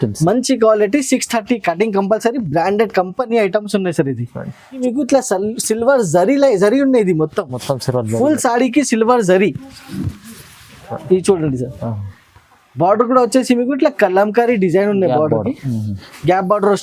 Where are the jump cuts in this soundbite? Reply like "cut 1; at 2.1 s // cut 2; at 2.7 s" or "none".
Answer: cut 1; at 4.8 s